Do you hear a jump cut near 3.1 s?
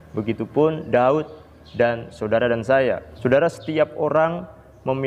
yes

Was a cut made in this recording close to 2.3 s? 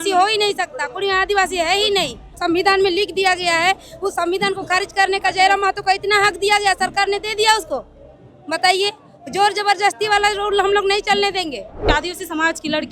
yes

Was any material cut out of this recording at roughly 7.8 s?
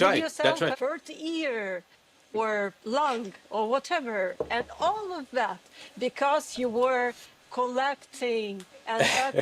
no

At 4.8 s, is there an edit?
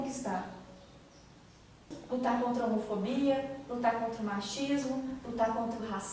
no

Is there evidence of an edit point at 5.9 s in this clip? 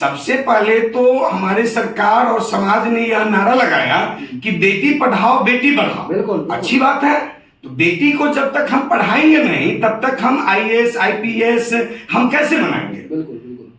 no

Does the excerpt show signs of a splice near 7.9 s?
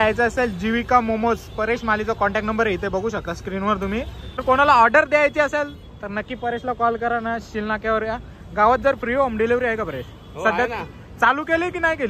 no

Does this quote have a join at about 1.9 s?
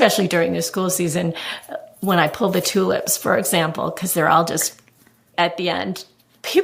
no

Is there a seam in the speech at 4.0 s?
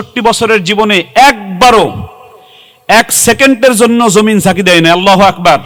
no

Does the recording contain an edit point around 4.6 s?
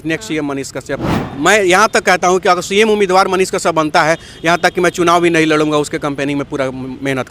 no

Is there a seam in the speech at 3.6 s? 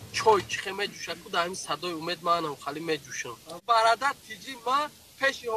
yes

